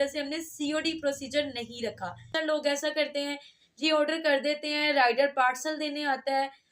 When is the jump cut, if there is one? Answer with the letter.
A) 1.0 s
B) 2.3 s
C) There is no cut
B